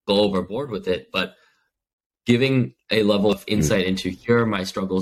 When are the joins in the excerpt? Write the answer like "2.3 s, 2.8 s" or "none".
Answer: 3.3 s

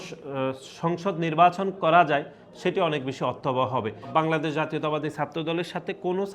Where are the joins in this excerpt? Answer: 4.1 s

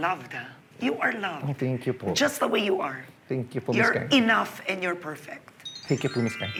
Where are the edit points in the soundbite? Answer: none

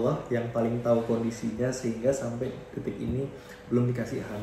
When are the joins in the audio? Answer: none

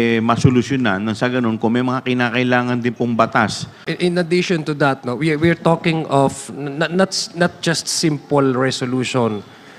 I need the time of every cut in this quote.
3.8 s

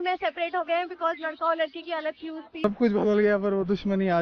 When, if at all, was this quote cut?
2.6 s

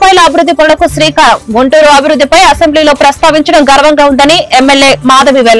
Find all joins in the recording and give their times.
none

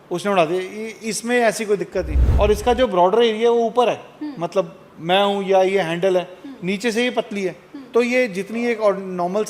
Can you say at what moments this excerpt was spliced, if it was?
2.2 s

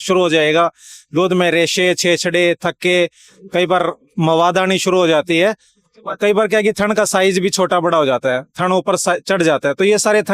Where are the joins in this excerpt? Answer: none

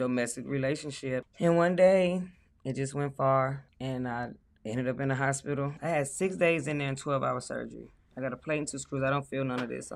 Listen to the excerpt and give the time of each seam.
1.3 s, 3.7 s, 5.8 s

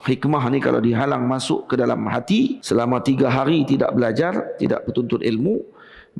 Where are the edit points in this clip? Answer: 2.6 s

